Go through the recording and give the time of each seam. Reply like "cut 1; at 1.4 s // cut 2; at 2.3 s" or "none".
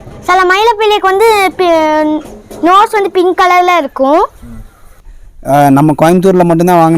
cut 1; at 5.0 s